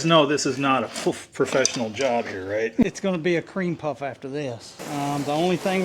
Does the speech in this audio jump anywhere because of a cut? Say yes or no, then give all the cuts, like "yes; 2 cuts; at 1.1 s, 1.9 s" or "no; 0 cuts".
yes; 2 cuts; at 2.8 s, 4.7 s